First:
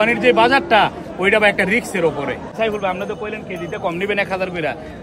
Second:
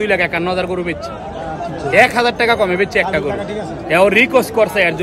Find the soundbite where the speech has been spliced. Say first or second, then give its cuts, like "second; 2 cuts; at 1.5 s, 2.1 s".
first; 1 cut; at 2.5 s